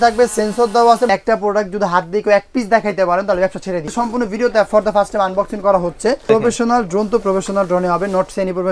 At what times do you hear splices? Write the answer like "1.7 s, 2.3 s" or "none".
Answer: 1.1 s, 3.9 s, 6.3 s